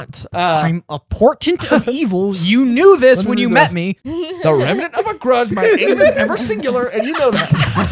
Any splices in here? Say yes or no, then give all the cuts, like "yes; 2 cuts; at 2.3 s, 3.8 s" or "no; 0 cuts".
yes; 1 cut; at 4.0 s